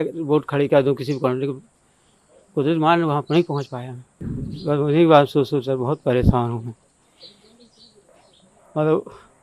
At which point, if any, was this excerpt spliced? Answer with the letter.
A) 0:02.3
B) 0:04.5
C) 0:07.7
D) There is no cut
B